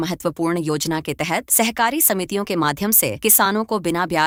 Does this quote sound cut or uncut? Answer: uncut